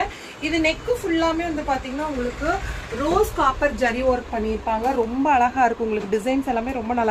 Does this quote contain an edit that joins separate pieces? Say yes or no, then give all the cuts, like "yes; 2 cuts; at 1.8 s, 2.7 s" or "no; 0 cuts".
no; 0 cuts